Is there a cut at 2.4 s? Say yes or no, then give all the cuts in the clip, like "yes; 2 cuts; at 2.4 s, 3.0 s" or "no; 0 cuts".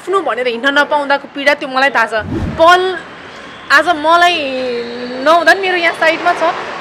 yes; 1 cut; at 2.4 s